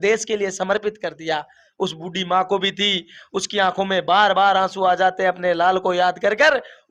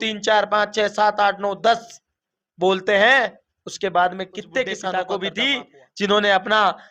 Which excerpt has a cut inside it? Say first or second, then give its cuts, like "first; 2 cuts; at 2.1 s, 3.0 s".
second; 1 cut; at 4.9 s